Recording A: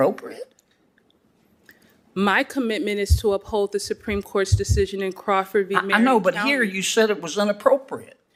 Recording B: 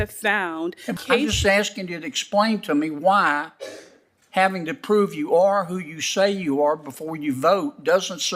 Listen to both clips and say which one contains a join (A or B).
B